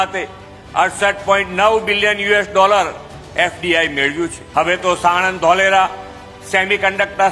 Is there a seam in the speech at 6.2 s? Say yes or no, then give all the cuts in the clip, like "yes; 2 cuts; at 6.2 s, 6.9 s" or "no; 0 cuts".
no; 1 cut; at 4.4 s